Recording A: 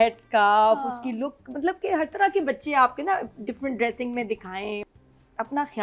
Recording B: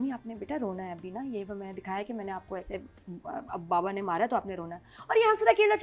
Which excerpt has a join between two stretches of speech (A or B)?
A